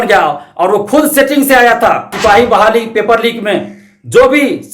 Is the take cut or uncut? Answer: cut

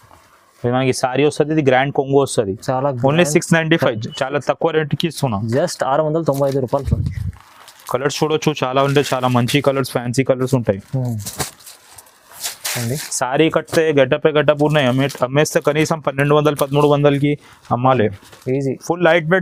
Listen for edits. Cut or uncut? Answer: uncut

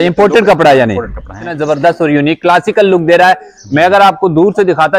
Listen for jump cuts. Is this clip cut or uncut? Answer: cut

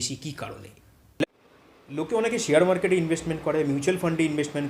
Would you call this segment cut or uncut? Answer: cut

